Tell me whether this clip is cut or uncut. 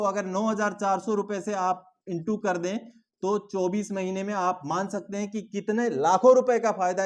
uncut